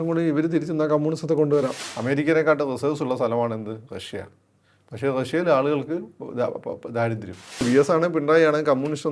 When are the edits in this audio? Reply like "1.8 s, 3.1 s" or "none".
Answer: 1.9 s, 7.6 s